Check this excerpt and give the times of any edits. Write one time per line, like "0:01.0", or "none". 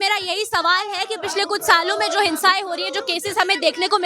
none

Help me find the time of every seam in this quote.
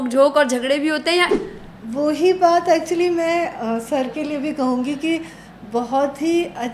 0:01.3

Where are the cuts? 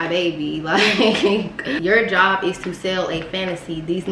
0:01.7

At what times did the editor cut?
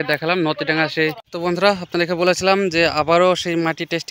0:01.2

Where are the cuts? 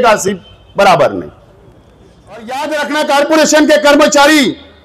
0:02.5

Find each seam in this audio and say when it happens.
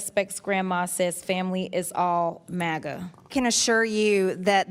0:03.3

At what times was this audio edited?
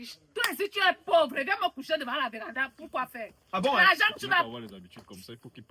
0:04.5

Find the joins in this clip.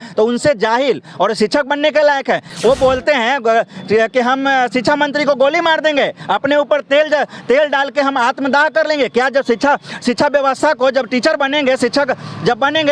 none

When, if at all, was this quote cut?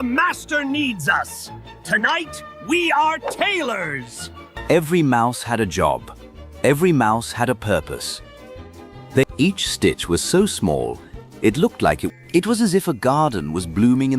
0:04.5
0:09.2
0:12.1

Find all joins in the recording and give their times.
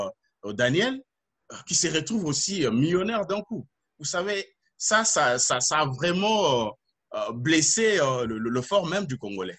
none

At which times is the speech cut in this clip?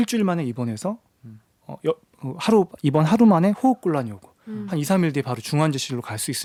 none

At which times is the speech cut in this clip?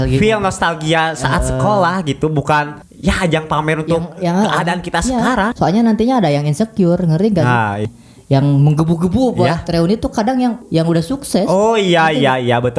0:02.8
0:05.5
0:07.8
0:10.6

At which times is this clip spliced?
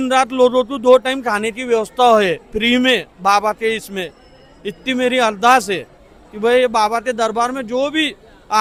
none

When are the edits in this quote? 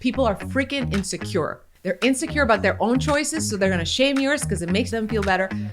0:01.7
0:04.9

